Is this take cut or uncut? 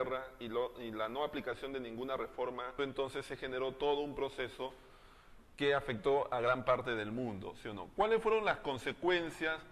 uncut